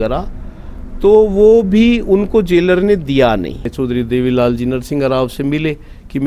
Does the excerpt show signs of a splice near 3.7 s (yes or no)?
yes